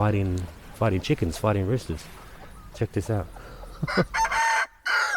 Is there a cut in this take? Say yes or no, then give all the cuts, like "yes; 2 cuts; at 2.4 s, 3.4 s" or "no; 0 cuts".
yes; 1 cut; at 4.1 s